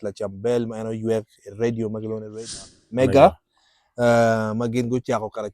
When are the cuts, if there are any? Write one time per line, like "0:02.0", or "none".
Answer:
0:02.6